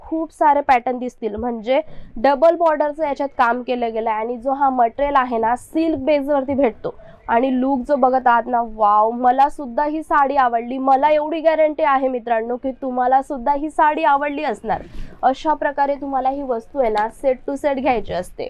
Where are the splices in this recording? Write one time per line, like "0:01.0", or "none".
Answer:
none